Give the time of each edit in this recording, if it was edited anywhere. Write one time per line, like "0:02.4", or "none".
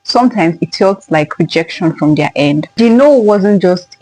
0:02.8